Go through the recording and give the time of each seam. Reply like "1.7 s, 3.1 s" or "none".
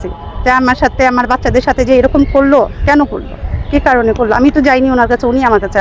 none